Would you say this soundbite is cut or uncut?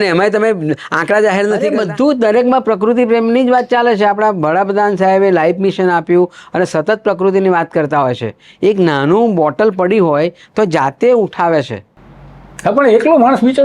cut